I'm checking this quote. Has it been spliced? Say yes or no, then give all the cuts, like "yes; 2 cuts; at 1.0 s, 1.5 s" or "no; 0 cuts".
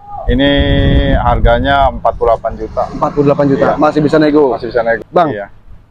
yes; 1 cut; at 5.0 s